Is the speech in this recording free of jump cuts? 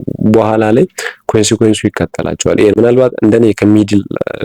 no; 1 cut; at 2.8 s

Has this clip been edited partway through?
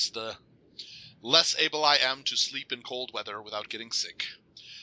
no; 0 cuts

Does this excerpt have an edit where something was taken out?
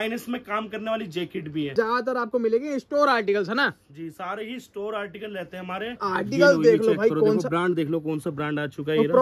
yes; 2 cuts; at 1.7 s, 6.1 s

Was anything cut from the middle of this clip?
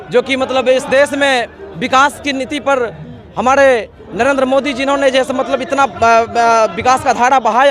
no; 0 cuts

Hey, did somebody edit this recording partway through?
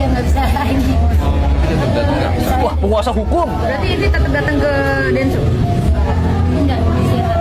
no; 0 cuts

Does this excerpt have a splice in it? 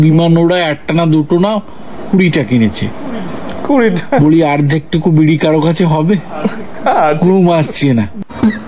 no; 0 cuts

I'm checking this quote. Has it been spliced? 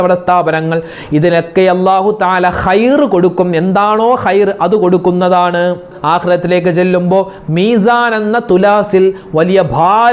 no; 0 cuts

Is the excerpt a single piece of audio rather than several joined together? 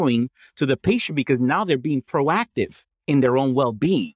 yes; 0 cuts

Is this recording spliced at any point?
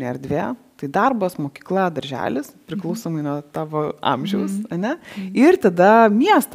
no; 0 cuts

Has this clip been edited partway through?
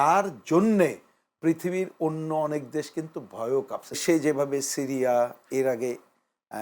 yes; 1 cut; at 4.0 s

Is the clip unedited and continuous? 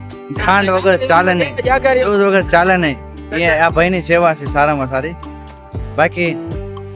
yes; 0 cuts

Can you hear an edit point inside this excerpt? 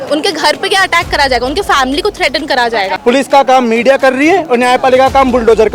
yes; 1 cut; at 3.0 s

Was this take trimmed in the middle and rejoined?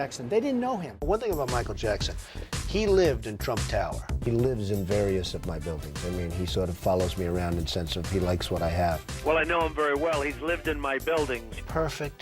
yes; 2 cuts; at 0.9 s, 4.2 s

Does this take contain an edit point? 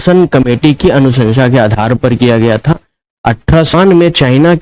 yes; 1 cut; at 3.7 s

